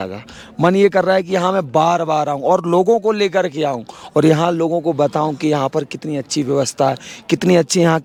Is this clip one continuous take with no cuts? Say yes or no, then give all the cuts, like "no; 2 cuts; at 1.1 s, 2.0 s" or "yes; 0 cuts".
yes; 0 cuts